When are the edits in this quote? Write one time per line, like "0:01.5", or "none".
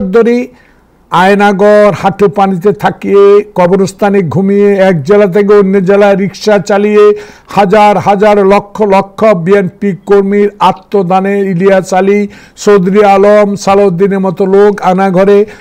none